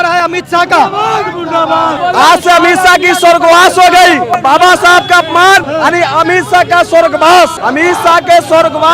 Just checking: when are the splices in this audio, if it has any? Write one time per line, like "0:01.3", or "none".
0:02.0
0:04.3
0:05.7
0:07.6